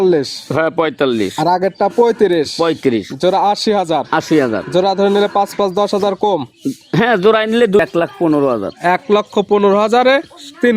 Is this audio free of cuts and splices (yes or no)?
no